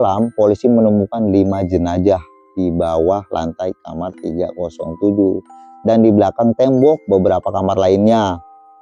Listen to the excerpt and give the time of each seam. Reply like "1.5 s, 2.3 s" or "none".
none